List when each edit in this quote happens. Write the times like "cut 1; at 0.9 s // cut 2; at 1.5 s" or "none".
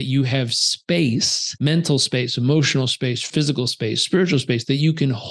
cut 1; at 1.4 s // cut 2; at 3.3 s